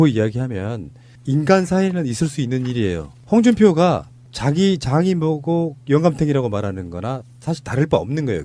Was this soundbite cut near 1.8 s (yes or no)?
yes